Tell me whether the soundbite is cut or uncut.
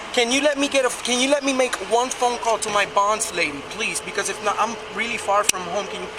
uncut